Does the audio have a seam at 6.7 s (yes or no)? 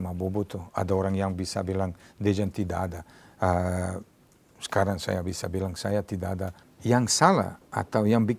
yes